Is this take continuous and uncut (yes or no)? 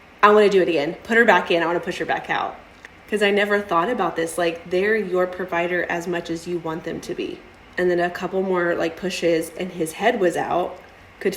no